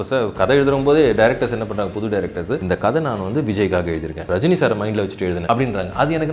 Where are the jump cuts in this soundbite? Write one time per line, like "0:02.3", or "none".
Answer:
0:02.6
0:04.2
0:05.4